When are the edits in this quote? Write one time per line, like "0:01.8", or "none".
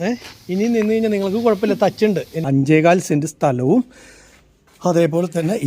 0:02.5